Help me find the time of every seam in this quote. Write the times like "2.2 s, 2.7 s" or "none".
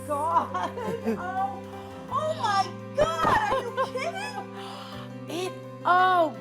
none